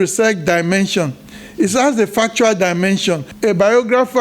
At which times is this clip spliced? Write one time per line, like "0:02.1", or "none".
0:03.3